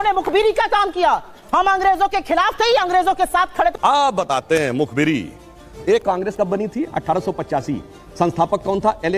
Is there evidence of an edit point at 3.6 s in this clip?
yes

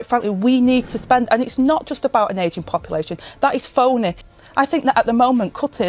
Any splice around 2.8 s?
no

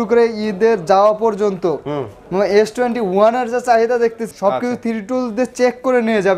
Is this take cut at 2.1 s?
no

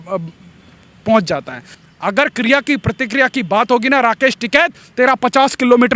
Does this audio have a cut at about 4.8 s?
no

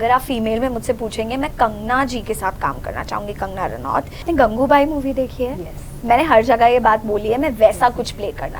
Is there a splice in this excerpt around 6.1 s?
no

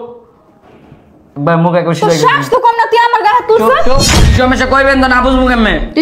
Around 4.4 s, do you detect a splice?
yes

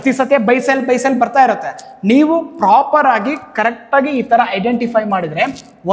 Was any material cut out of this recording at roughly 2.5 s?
no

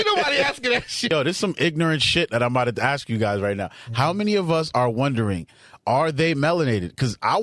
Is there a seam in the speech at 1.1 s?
yes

